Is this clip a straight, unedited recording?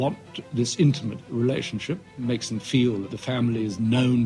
no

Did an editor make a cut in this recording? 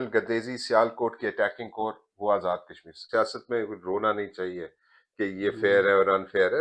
yes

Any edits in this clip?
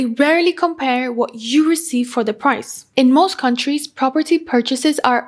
yes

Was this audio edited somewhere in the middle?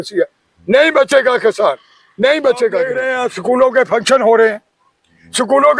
yes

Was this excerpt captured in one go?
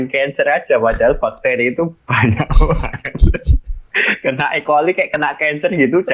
yes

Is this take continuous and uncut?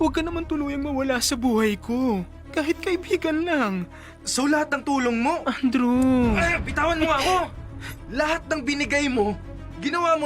no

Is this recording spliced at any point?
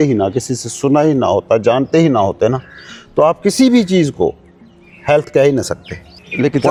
no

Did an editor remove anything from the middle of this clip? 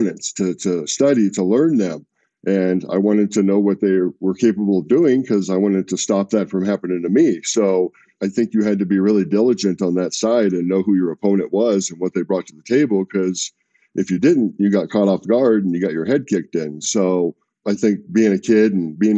yes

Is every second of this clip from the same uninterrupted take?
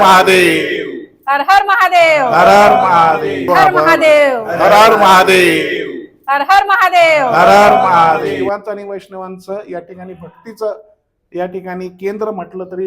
no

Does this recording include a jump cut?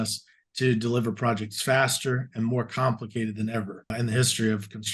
yes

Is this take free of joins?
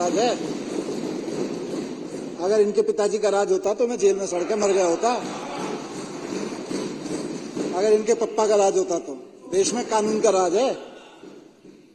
yes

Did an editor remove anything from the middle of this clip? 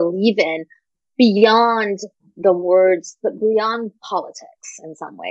no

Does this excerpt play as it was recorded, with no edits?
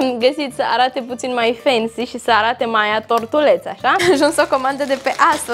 no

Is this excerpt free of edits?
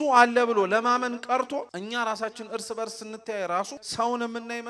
no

